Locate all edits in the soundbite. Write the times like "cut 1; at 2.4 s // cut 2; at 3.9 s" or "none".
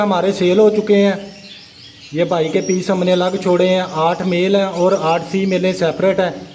none